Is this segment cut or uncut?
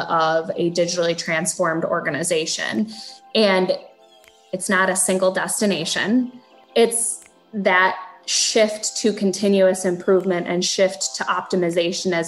cut